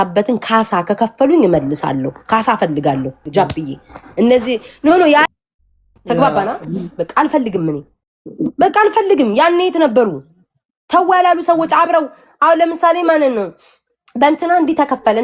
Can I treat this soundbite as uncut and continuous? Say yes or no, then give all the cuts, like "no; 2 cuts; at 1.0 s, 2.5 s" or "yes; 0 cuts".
no; 1 cut; at 5.2 s